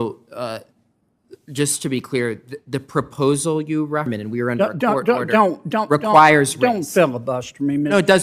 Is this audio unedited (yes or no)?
no